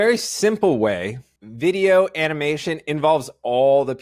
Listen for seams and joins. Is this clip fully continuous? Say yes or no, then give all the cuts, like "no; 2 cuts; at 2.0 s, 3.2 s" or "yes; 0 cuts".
yes; 0 cuts